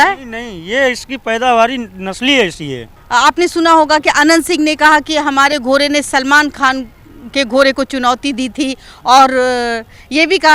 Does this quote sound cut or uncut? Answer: uncut